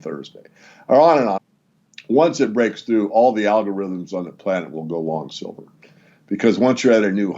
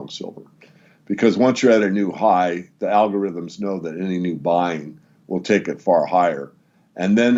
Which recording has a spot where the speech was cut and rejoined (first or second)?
first